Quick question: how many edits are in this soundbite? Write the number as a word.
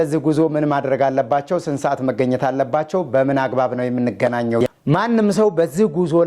one